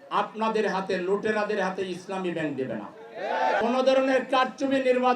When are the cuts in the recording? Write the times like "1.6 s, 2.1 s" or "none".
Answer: 3.6 s